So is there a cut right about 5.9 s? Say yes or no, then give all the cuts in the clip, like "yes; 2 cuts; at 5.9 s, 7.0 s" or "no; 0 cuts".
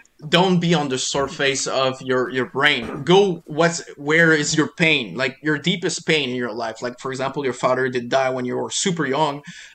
no; 0 cuts